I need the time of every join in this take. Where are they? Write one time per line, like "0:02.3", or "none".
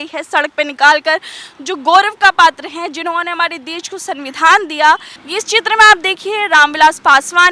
0:05.2